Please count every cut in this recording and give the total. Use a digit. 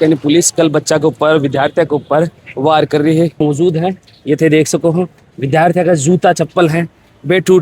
1